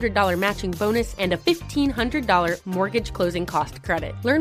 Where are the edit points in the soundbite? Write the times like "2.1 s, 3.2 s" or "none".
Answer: none

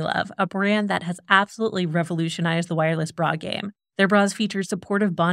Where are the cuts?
none

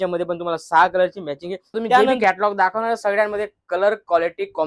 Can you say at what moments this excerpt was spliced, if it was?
2.1 s

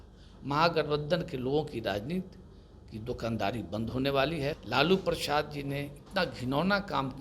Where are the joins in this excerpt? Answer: 4.6 s

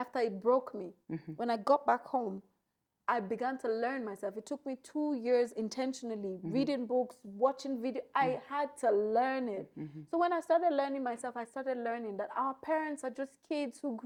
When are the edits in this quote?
none

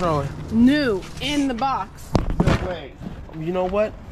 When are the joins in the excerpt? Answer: none

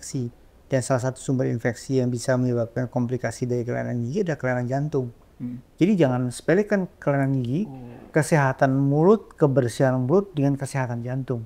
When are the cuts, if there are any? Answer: none

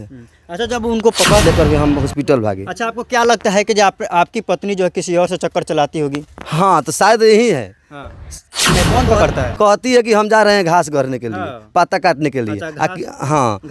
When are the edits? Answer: 1.4 s, 8.7 s

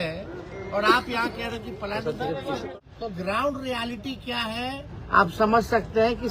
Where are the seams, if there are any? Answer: 2.7 s

